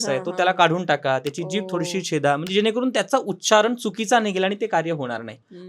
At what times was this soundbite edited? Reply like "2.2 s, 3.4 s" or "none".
none